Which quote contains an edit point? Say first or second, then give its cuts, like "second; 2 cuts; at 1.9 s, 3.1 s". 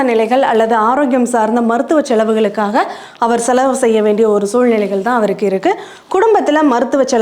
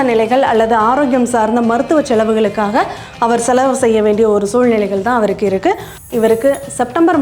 second; 1 cut; at 6.0 s